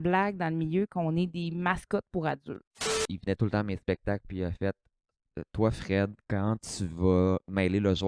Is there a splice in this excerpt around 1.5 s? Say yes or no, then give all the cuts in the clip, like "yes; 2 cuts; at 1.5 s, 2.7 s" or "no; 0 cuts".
no; 1 cut; at 3.1 s